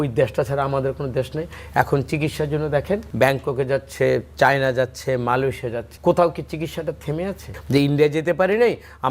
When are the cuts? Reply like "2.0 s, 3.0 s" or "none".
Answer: 3.1 s, 5.9 s, 7.5 s